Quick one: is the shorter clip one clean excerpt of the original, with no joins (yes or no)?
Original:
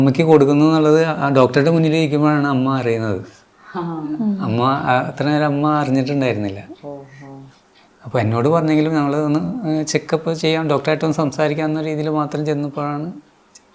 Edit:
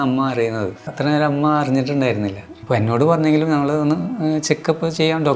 no